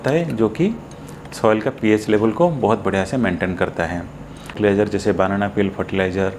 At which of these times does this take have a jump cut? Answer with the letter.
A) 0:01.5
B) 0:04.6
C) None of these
B